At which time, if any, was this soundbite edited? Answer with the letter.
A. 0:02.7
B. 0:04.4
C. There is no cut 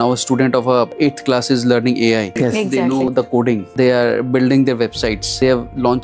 C